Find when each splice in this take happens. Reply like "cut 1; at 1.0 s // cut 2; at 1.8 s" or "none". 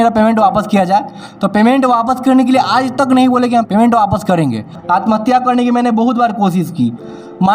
cut 1; at 3.7 s // cut 2; at 4.8 s